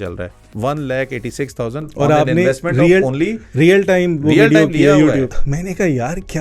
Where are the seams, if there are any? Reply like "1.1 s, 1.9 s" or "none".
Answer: 5.4 s